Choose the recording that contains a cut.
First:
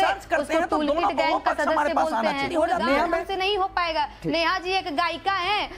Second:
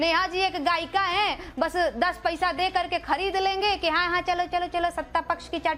first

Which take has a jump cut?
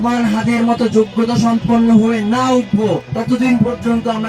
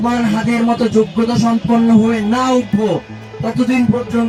first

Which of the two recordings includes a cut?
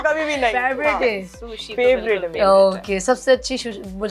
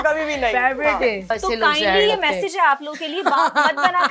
second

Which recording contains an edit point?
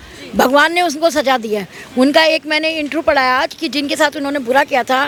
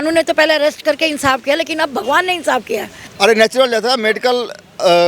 second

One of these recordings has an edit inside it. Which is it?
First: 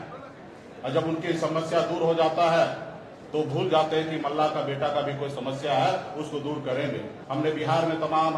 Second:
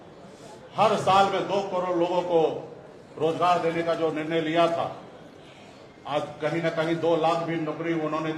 first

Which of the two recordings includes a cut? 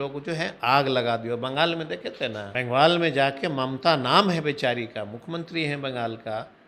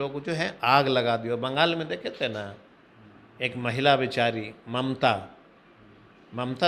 first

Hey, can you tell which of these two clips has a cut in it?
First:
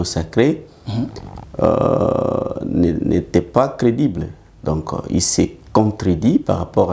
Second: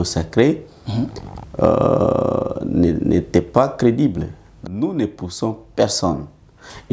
second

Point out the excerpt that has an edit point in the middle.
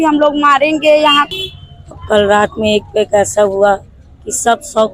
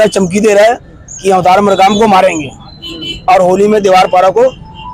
first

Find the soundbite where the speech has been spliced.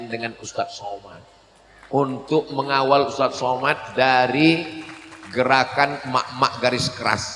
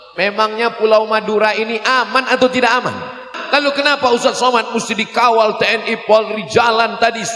second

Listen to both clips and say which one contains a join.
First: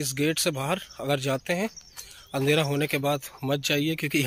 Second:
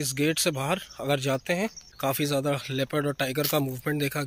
second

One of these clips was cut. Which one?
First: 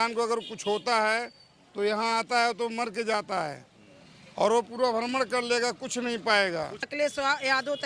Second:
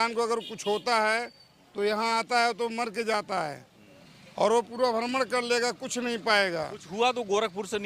first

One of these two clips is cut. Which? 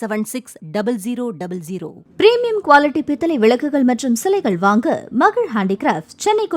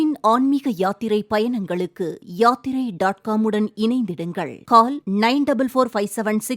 first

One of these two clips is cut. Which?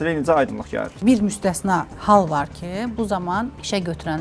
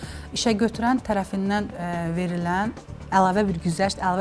first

